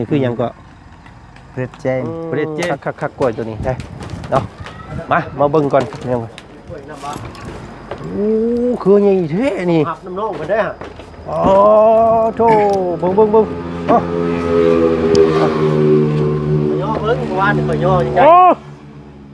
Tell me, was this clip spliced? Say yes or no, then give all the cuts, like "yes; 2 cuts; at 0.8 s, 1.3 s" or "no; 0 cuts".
yes; 1 cut; at 2.6 s